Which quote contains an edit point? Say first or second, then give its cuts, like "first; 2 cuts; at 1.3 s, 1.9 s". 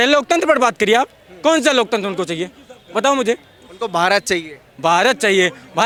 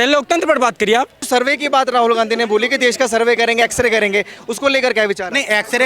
second; 1 cut; at 1.2 s